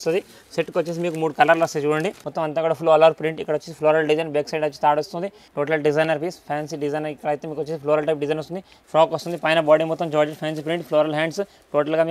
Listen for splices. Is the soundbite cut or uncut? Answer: cut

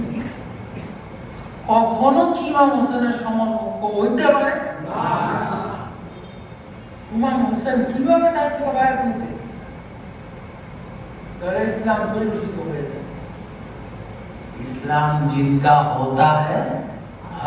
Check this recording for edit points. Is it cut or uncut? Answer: uncut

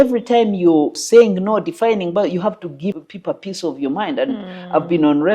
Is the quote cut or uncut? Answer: cut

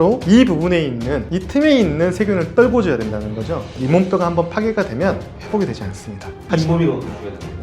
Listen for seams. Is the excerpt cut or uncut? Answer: cut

